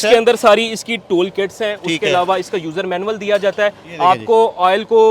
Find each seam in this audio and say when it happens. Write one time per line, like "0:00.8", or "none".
none